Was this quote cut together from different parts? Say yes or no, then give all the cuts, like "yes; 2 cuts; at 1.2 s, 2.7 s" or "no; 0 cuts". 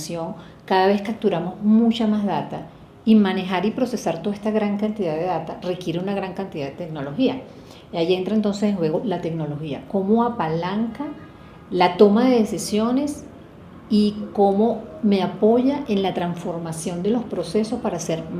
no; 0 cuts